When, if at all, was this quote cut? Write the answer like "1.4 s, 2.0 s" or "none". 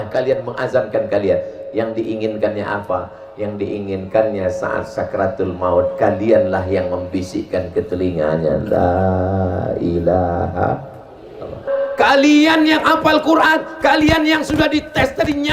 11.6 s